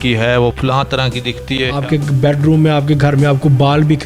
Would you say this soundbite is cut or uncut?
cut